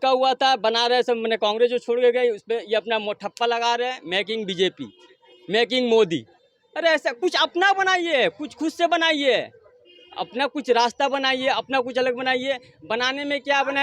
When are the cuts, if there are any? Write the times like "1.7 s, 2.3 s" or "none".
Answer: none